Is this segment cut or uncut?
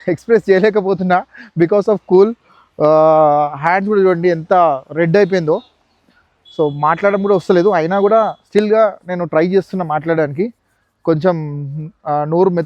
uncut